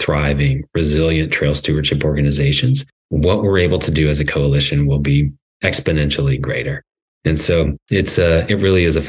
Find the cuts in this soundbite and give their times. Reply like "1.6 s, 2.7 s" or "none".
2.9 s, 5.4 s